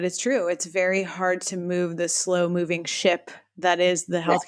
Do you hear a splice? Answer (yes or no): no